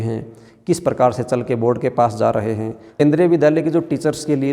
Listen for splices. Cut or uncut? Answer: cut